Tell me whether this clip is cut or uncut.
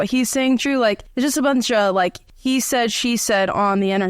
cut